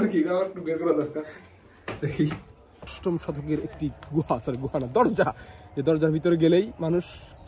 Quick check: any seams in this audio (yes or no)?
yes